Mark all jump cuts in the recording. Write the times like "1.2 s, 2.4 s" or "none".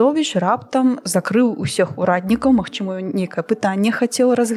none